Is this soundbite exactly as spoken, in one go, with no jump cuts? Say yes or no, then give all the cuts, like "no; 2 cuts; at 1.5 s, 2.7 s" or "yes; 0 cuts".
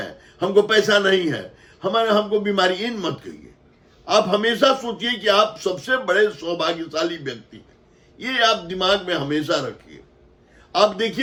yes; 0 cuts